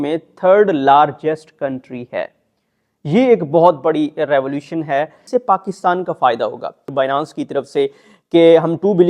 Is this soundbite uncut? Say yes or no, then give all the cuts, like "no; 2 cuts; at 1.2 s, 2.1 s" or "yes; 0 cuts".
no; 2 cuts; at 5.2 s, 6.9 s